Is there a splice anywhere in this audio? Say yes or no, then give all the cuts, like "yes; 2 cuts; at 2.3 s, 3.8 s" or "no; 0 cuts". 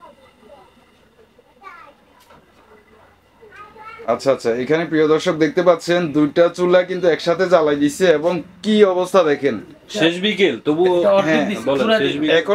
no; 0 cuts